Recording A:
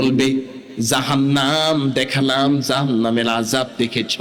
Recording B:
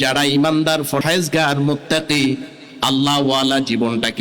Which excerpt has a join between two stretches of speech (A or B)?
B